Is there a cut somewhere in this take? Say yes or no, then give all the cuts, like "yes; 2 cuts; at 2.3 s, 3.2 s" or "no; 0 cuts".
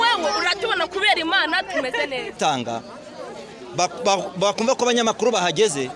yes; 1 cut; at 2.3 s